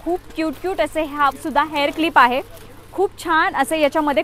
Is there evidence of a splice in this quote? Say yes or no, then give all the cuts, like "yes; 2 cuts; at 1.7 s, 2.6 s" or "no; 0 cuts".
no; 0 cuts